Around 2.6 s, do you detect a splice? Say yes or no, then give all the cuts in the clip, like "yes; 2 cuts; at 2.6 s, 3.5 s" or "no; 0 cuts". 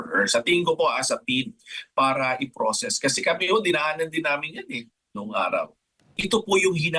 no; 1 cut; at 6.1 s